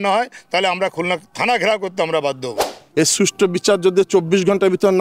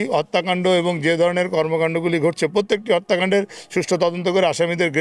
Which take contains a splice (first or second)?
first